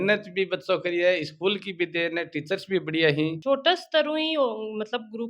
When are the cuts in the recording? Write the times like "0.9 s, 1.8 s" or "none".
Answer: 3.4 s